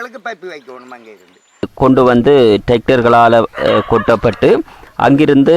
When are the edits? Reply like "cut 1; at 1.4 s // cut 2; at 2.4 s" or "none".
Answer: cut 1; at 1.7 s